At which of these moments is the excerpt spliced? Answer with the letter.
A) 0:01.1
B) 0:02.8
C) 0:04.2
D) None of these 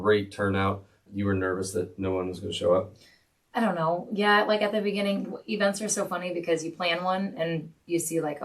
A